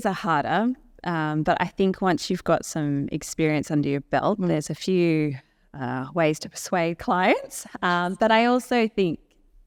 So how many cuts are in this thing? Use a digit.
0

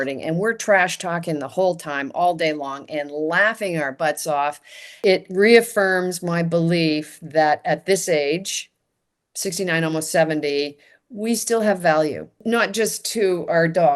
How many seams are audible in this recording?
2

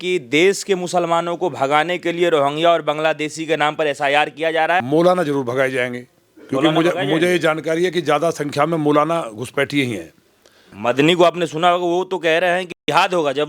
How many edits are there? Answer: 2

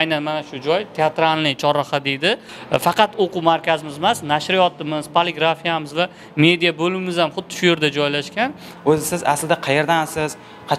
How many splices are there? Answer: 2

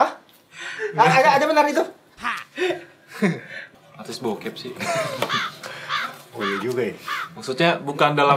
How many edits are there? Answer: 1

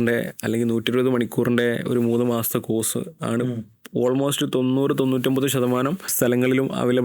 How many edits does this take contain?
1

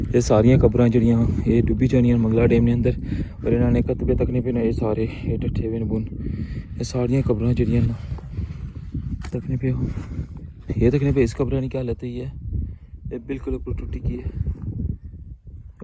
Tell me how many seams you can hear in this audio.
1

